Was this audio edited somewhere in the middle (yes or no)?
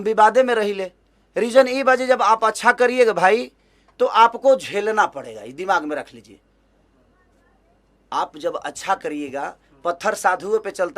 no